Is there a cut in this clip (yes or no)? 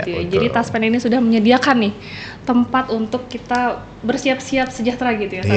no